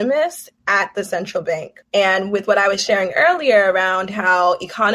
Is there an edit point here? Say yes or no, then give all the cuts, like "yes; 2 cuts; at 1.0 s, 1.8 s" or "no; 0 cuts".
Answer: yes; 1 cut; at 1.7 s